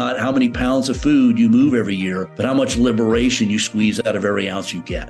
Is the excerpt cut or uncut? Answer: cut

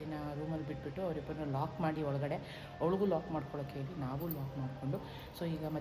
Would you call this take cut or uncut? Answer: uncut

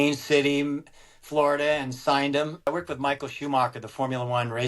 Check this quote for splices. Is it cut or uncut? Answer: cut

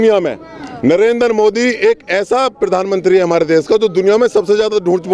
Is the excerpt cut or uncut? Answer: uncut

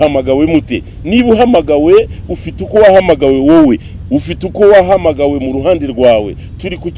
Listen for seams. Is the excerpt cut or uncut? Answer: uncut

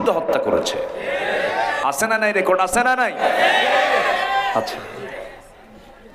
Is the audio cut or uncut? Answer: uncut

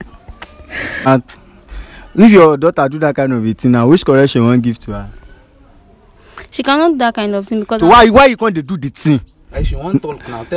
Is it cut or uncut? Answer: cut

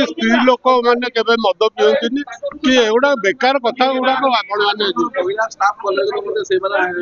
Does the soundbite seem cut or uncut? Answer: uncut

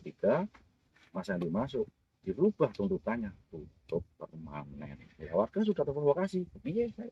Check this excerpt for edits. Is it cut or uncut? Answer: uncut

